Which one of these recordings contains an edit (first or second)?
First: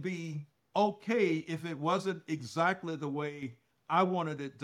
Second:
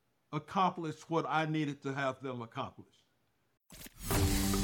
second